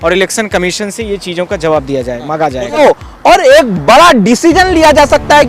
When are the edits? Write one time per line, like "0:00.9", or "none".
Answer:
0:02.8